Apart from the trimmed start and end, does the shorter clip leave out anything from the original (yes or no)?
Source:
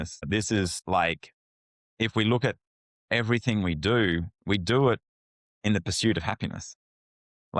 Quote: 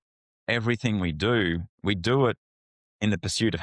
no